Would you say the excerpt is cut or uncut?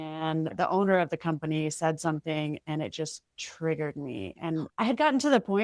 uncut